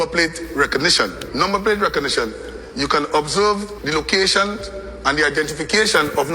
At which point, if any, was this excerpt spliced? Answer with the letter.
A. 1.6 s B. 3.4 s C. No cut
A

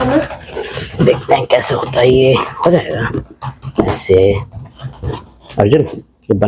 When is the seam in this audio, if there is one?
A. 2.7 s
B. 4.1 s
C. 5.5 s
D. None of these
D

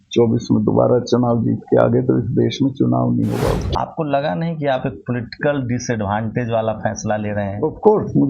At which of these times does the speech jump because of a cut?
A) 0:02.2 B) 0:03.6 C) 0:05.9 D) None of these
B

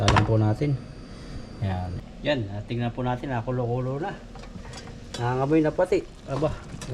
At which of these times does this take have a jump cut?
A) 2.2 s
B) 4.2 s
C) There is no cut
A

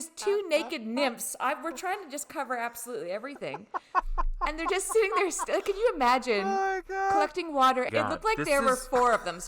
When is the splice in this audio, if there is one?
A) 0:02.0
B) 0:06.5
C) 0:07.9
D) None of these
C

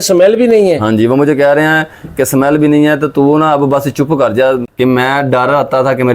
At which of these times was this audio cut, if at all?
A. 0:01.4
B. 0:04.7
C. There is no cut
B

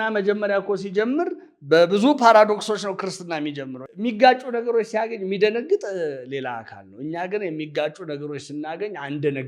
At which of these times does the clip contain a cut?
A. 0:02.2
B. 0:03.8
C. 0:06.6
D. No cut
B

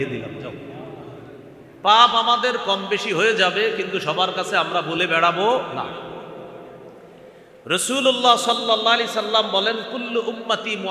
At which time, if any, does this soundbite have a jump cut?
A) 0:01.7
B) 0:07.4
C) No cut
A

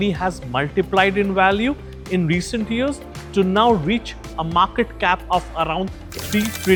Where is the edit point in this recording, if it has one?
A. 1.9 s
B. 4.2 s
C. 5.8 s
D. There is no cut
D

